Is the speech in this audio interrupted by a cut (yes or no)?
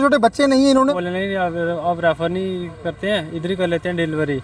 yes